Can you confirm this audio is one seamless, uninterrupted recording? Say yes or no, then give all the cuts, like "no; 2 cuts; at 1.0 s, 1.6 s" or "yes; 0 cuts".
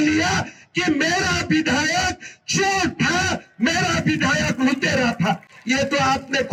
yes; 0 cuts